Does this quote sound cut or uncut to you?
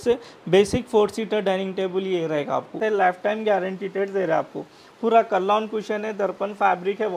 cut